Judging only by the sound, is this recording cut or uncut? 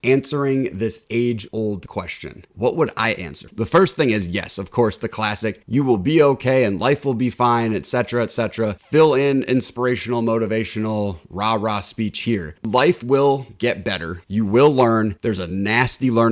cut